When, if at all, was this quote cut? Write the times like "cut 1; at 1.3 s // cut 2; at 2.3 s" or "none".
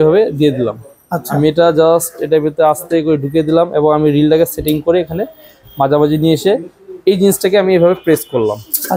none